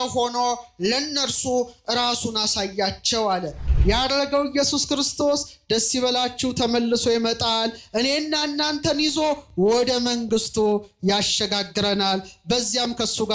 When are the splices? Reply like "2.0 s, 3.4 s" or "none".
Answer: 3.7 s